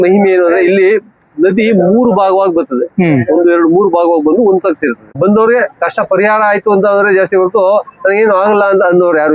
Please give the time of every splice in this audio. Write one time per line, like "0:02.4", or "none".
0:05.2